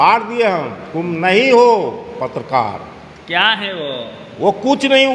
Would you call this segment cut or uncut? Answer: uncut